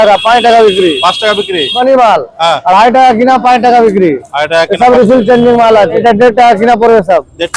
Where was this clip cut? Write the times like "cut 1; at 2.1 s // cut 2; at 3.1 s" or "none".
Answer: cut 1; at 1.8 s // cut 2; at 6.0 s